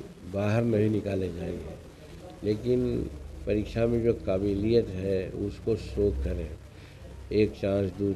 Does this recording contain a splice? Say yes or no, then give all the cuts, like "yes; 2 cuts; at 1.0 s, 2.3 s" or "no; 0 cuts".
no; 0 cuts